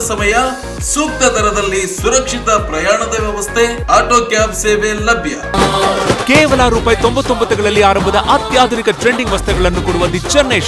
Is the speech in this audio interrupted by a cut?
yes; 1 cut; at 5.5 s

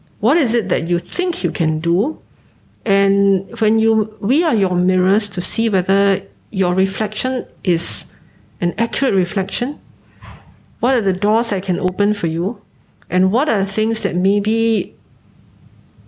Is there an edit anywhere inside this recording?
no; 0 cuts

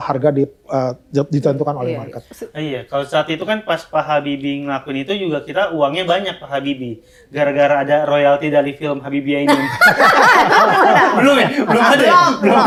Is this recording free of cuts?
yes; 0 cuts

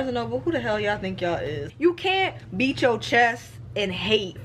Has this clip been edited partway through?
yes; 1 cut; at 1.6 s

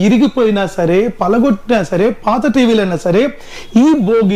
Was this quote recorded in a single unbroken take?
yes; 0 cuts

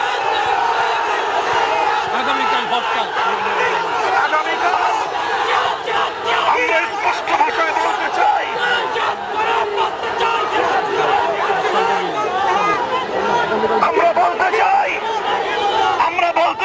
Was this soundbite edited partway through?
no; 0 cuts

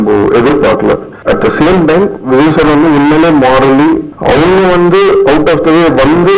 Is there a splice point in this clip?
yes; 2 cuts; at 1.1 s, 4.1 s

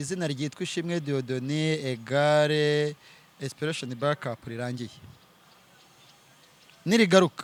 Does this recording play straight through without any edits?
yes; 0 cuts

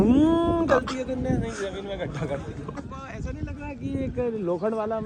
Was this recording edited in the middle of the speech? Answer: yes; 1 cut; at 2.9 s

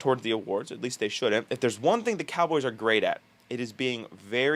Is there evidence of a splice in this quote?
yes; 1 cut; at 1.5 s

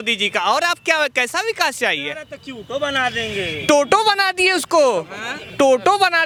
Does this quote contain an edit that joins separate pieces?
no; 0 cuts

